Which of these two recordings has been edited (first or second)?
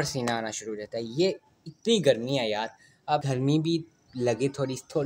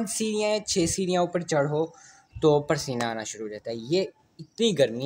first